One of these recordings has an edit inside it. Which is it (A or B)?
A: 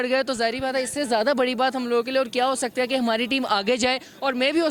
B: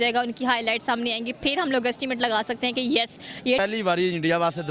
B